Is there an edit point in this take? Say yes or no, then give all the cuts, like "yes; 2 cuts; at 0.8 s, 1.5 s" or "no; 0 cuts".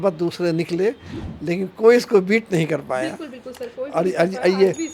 no; 0 cuts